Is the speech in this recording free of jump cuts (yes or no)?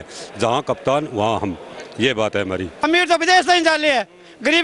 no